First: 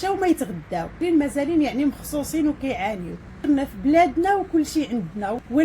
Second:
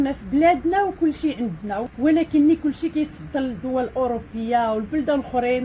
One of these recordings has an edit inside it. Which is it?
first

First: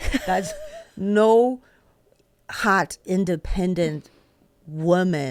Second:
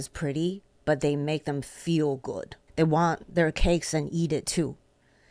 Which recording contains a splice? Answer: second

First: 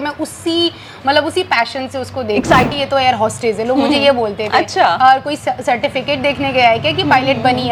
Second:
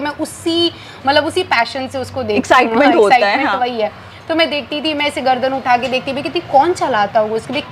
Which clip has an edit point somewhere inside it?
first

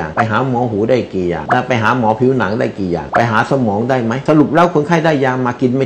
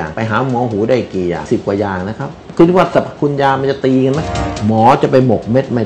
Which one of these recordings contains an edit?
second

